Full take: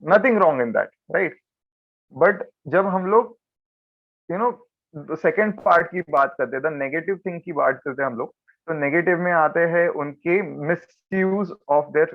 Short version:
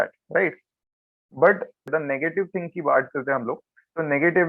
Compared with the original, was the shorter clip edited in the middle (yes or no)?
yes